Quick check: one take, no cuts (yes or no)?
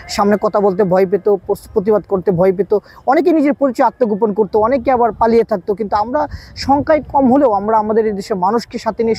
yes